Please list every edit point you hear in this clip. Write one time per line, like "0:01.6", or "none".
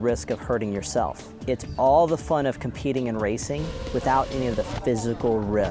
0:01.3